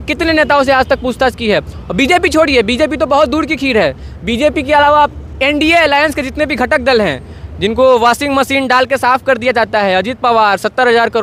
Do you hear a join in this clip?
no; 0 cuts

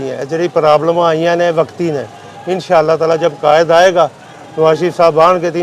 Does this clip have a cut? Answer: no; 0 cuts

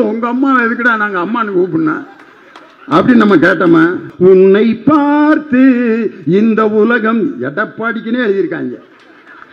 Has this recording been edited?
yes; 1 cut; at 4.0 s

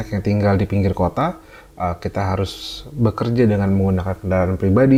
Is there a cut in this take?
no; 0 cuts

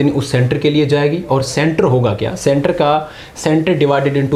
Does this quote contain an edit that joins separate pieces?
no; 0 cuts

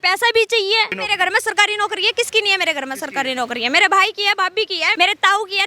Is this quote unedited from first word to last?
no; 2 cuts; at 1.0 s, 4.9 s

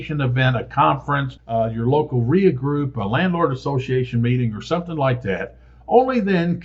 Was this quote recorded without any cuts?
yes; 0 cuts

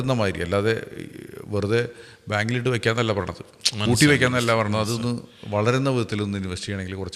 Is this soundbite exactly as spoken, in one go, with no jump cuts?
yes; 0 cuts

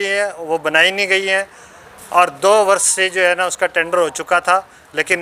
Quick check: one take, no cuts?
yes; 0 cuts

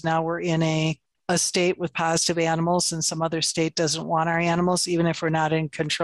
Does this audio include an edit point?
yes; 1 cut; at 1.1 s

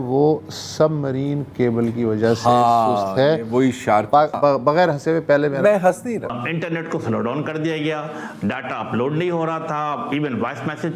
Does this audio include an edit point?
yes; 2 cuts; at 4.3 s, 6.3 s

